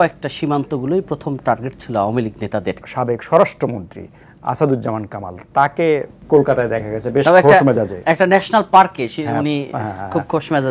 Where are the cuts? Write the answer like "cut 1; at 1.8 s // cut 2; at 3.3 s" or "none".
cut 1; at 2.8 s